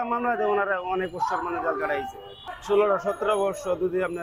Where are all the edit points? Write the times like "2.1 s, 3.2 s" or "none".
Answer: 2.4 s